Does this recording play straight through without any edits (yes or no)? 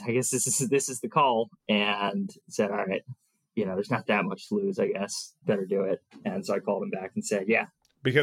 no